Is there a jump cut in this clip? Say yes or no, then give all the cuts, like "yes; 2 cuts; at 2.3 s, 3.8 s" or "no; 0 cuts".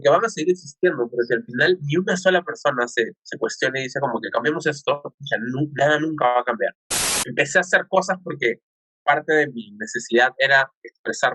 yes; 1 cut; at 7.0 s